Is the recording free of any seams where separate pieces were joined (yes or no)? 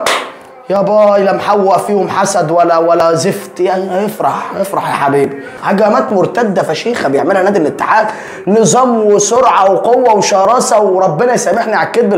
no